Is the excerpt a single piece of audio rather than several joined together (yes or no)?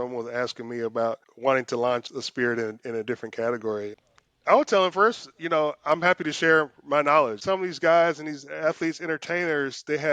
no